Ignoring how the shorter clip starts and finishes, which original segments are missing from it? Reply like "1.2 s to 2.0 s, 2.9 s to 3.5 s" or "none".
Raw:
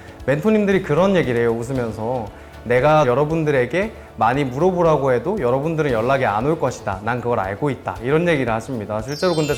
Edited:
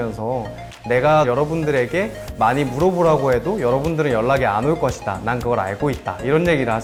none